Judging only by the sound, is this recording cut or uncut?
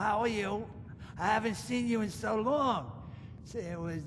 uncut